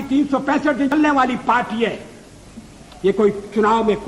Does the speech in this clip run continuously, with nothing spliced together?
no; 1 cut; at 0.9 s

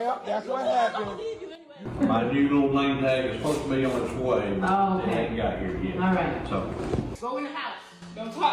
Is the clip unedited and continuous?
no; 2 cuts; at 1.7 s, 7.1 s

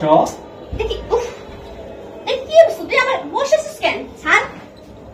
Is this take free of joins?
yes; 0 cuts

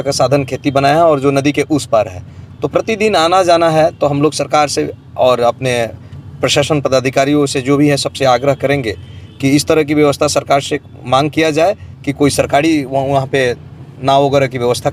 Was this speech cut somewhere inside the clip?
no; 0 cuts

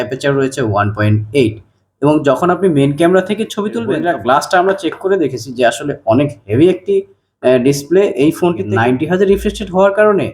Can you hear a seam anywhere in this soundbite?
yes; 2 cuts; at 4.0 s, 8.7 s

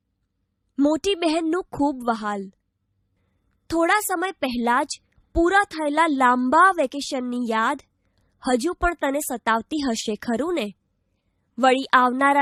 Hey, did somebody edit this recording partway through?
no; 0 cuts

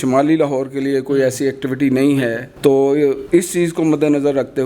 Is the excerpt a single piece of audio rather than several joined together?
no; 2 cuts; at 2.5 s, 3.2 s

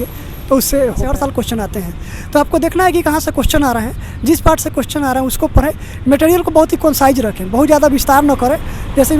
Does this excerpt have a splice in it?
yes; 1 cut; at 1.1 s

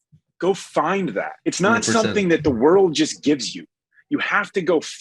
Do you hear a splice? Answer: yes; 1 cut; at 1.3 s

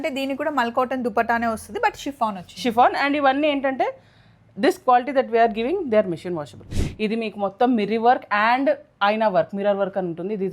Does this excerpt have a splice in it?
yes; 1 cut; at 6.7 s

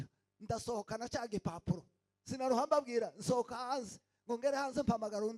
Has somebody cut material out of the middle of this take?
no; 0 cuts

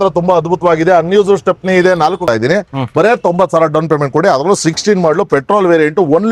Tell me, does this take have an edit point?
yes; 1 cut; at 2.2 s

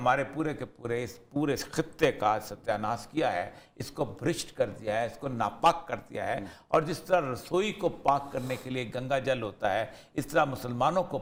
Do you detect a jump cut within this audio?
no; 0 cuts

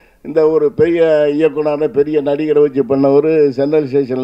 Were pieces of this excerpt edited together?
no; 0 cuts

